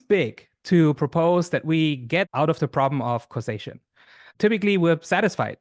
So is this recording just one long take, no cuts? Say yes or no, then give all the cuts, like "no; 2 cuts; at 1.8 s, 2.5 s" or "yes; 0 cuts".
no; 2 cuts; at 2.3 s, 4.3 s